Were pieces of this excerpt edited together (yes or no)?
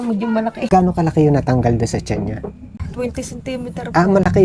yes